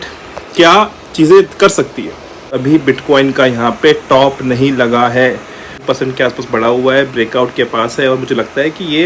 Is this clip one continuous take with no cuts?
no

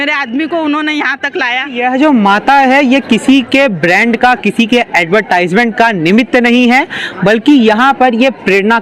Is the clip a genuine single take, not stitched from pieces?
no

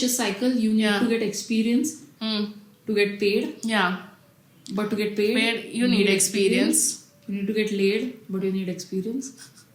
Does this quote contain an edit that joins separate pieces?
no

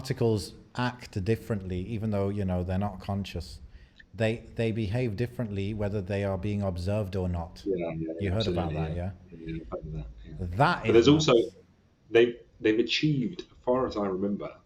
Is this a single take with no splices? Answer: yes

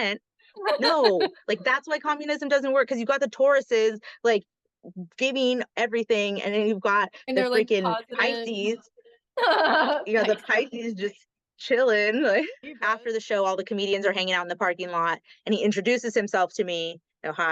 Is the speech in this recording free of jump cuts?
no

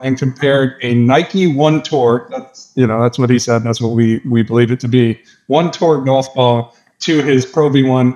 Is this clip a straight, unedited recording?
yes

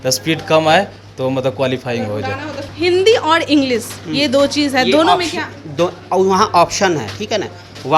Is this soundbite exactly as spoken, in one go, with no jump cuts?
no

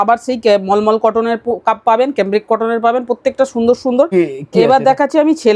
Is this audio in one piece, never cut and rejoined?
no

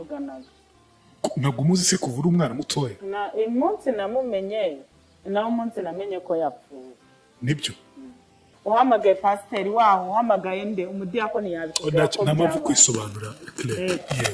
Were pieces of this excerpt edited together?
yes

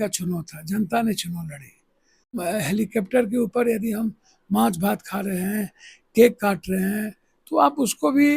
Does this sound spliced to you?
yes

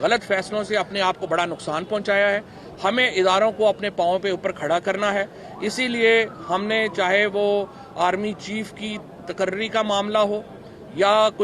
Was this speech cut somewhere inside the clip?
no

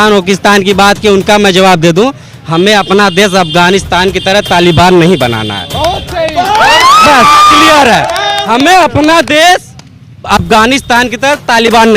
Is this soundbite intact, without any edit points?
yes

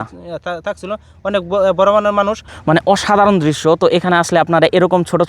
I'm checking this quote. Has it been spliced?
yes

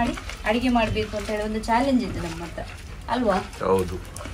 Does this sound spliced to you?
no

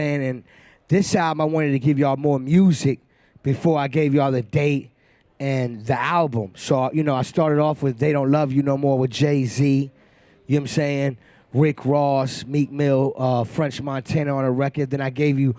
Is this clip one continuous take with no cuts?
yes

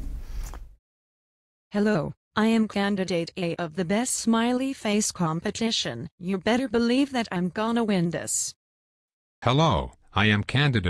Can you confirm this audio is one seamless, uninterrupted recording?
yes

